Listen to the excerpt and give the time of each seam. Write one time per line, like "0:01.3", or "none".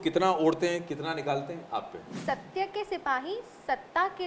0:02.2